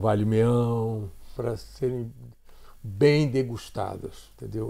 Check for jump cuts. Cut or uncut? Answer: cut